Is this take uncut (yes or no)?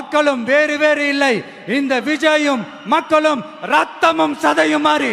yes